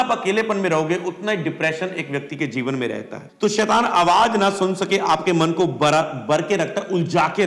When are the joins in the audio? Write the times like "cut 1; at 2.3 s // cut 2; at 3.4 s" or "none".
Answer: cut 1; at 3.2 s